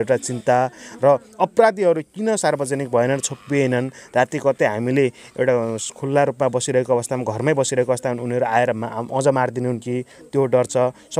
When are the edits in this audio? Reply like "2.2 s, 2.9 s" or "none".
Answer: none